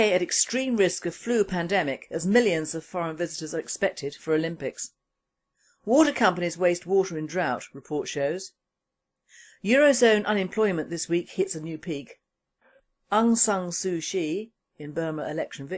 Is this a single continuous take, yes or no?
no